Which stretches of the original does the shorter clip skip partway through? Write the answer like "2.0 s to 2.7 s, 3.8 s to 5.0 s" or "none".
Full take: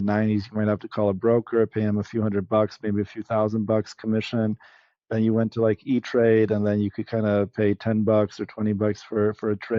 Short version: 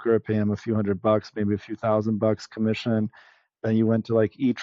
none